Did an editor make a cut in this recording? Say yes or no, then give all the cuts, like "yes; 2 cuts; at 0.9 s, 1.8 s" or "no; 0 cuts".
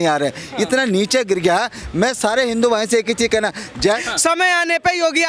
yes; 1 cut; at 3.7 s